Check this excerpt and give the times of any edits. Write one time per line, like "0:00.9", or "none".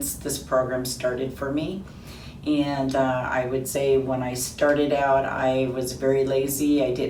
none